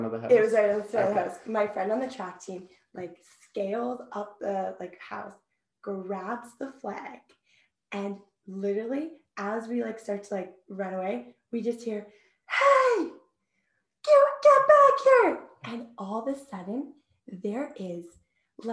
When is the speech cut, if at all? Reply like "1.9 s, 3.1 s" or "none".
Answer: none